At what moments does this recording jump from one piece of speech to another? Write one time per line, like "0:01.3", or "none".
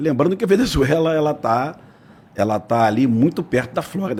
none